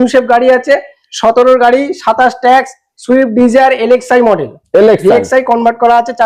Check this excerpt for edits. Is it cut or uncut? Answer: uncut